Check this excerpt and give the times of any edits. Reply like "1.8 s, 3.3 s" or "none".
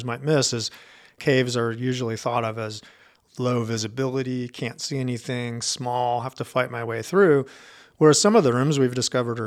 1.2 s